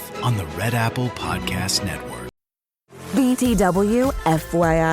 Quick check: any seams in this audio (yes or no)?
yes